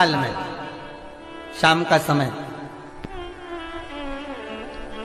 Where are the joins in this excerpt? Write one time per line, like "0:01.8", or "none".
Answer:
none